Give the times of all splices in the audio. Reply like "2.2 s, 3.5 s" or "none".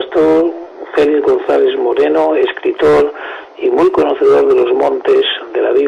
none